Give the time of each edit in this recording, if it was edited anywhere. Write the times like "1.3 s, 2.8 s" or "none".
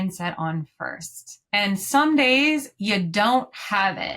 1.3 s